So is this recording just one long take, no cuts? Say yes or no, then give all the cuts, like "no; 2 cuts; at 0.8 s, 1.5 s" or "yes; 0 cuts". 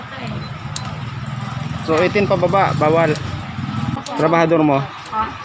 no; 1 cut; at 4.0 s